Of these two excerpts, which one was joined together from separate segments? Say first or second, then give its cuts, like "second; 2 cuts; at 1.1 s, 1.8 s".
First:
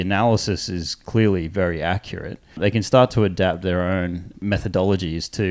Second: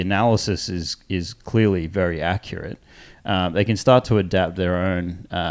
first; 3 cuts; at 1.0 s, 2.6 s, 4.3 s